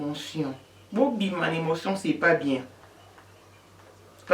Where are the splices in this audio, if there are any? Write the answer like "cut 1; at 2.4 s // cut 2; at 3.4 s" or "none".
cut 1; at 2.8 s